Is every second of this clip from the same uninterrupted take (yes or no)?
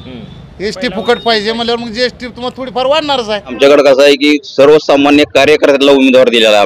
no